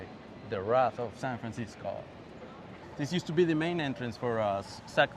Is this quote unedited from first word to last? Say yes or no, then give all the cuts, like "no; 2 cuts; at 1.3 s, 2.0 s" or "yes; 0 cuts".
no; 1 cut; at 2.8 s